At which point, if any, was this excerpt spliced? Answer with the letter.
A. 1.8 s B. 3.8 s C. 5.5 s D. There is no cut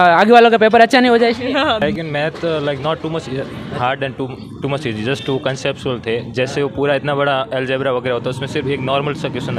A